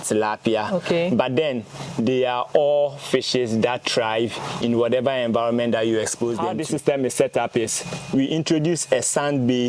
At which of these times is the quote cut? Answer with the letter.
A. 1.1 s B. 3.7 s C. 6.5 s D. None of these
C